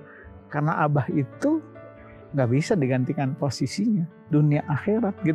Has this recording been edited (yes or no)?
no